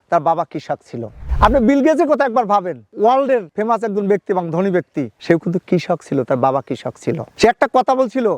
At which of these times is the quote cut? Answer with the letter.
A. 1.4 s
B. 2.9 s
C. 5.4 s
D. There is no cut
D